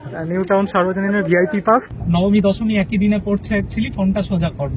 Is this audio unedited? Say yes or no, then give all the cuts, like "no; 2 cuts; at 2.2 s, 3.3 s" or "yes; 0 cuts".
no; 1 cut; at 1.9 s